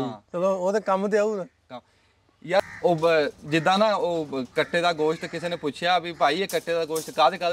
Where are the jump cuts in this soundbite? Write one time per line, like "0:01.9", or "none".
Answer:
0:02.6